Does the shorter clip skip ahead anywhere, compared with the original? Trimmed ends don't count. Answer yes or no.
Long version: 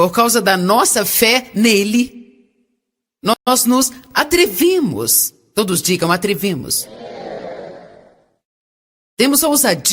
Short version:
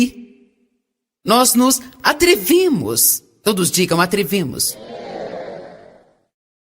yes